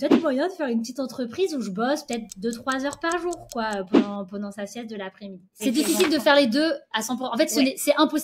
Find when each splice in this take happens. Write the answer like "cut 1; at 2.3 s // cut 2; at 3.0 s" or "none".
cut 1; at 5.6 s